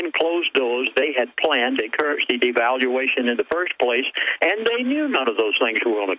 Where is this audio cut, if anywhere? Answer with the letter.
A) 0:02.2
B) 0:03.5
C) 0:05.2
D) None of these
A